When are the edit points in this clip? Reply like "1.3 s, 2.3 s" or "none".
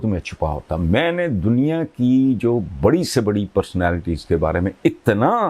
none